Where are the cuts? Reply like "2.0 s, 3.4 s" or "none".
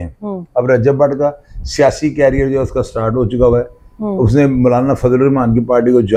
none